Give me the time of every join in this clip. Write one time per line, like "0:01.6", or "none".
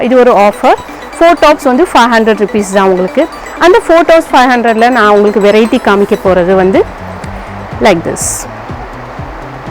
none

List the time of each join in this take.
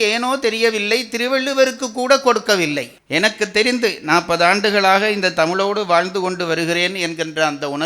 0:02.9

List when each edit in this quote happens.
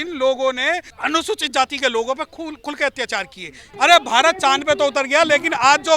0:00.9
0:03.6

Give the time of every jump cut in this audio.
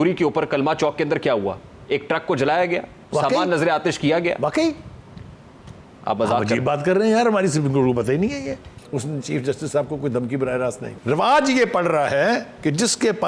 0:08.7
0:10.9

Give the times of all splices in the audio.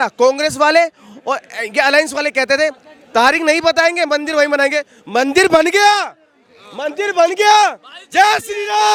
none

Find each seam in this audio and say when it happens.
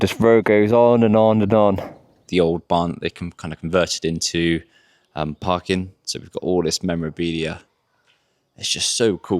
0:02.2

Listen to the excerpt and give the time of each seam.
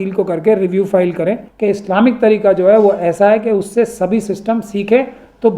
0:01.5

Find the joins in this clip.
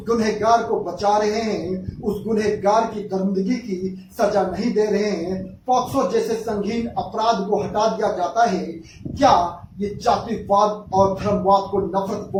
none

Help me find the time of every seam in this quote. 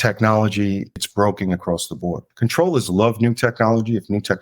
0:01.0
0:02.2

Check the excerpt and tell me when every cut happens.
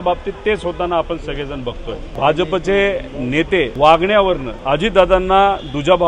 0:02.1
0:03.7
0:04.5

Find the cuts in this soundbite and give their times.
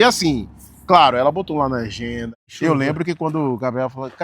0:02.3

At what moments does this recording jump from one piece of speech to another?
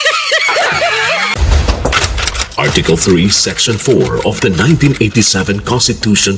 0:01.4

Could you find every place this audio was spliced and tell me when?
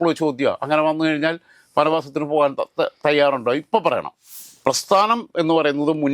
0:04.2

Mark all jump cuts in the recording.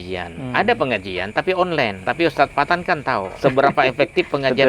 0:02.0
0:03.3

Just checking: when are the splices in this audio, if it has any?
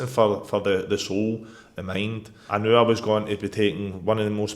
0:02.3

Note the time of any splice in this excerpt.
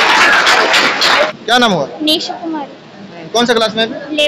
0:01.3

